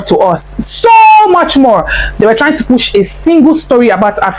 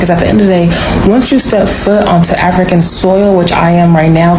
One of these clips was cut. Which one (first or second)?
first